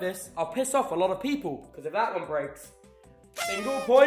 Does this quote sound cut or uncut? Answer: cut